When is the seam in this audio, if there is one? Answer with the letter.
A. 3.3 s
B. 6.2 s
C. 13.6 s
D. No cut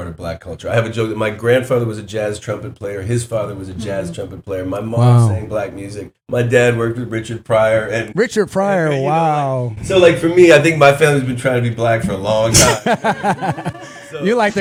D